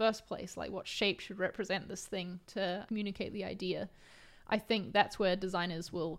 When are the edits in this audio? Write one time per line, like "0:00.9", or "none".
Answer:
0:02.8